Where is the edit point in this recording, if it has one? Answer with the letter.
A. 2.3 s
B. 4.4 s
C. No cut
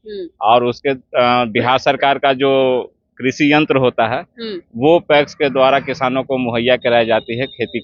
C